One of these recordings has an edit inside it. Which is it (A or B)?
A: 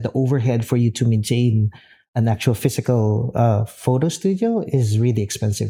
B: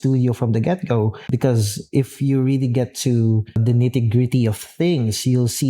B